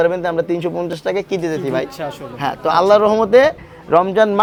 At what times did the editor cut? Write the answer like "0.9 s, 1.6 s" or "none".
none